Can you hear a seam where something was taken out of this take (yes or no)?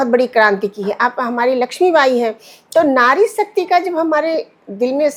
no